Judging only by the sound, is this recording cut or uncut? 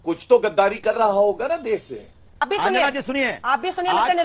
cut